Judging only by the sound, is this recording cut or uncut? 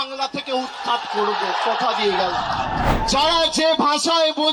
cut